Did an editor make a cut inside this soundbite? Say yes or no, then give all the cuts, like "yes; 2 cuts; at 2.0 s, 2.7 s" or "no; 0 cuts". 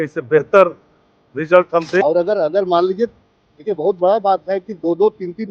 yes; 1 cut; at 2.0 s